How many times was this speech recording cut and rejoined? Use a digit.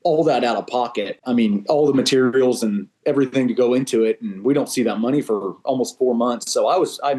0